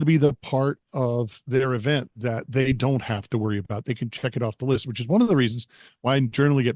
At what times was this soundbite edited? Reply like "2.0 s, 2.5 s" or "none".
1.4 s